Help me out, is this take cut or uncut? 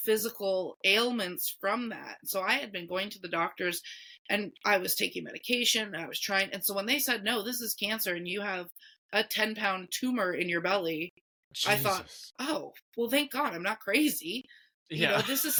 uncut